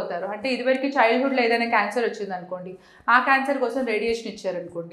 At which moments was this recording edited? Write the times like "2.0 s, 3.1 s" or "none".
none